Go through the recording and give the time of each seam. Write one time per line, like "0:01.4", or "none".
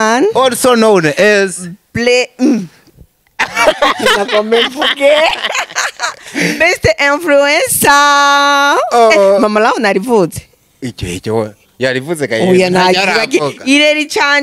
none